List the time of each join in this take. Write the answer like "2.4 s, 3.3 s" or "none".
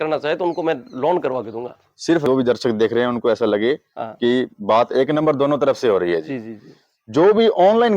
2.2 s